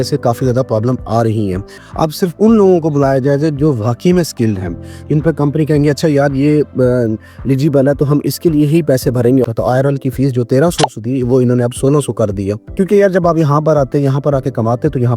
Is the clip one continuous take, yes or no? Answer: no